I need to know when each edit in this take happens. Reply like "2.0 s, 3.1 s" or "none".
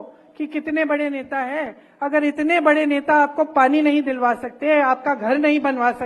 none